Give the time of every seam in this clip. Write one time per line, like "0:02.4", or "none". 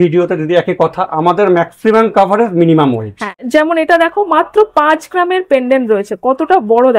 0:03.3